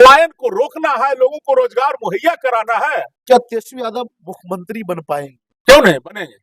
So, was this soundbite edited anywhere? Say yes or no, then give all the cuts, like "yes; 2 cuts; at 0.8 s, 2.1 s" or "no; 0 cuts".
yes; 1 cut; at 3.1 s